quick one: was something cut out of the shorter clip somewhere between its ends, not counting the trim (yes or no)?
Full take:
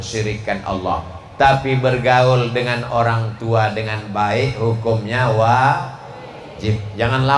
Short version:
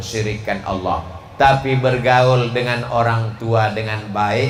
no